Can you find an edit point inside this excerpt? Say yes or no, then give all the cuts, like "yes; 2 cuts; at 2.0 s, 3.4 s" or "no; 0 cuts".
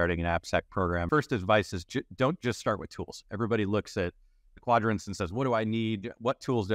yes; 1 cut; at 1.1 s